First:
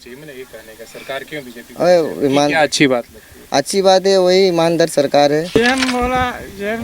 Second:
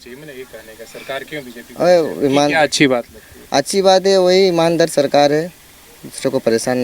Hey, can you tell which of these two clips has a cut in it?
first; 1 cut; at 5.5 s

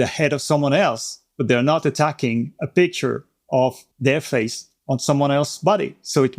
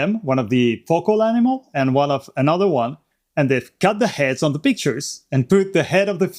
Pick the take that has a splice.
first; 2 cuts; at 3.9 s, 4.7 s

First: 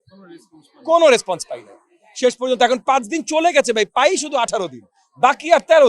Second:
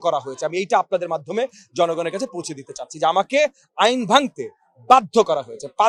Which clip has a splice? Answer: first; 1 cut; at 4.0 s

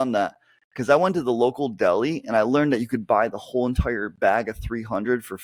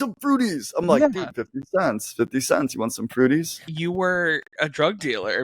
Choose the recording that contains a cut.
second; 1 cut; at 3.6 s

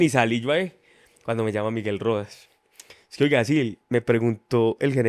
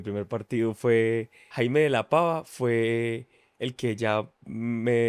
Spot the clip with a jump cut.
second; 1 cut; at 1.4 s

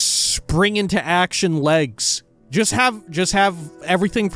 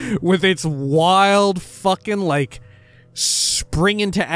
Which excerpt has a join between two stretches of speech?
first; 1 cut; at 2.3 s

